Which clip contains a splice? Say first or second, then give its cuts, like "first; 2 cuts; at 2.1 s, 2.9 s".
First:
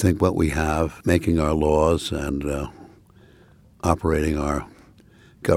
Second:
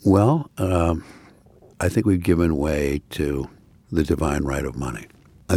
first; 1 cut; at 1.0 s